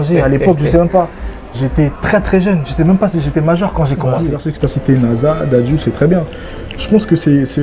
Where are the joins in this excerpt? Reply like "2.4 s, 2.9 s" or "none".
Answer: 4.4 s